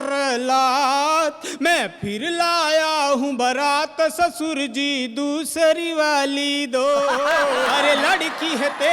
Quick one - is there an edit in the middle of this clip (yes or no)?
yes